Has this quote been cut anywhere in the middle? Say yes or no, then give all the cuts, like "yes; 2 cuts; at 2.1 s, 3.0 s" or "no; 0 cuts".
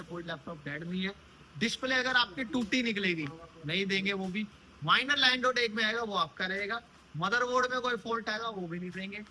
no; 0 cuts